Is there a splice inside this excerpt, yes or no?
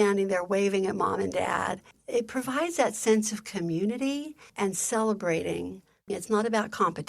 yes